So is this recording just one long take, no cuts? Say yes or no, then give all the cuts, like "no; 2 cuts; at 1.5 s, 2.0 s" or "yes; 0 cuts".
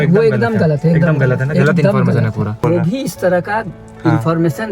no; 1 cut; at 2.6 s